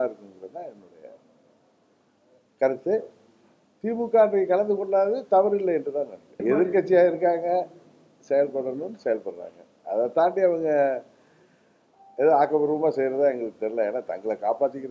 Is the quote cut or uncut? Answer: cut